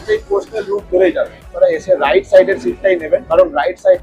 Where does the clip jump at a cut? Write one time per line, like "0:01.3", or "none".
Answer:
0:01.5
0:03.3